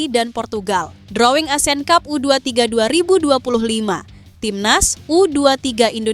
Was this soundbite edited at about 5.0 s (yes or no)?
no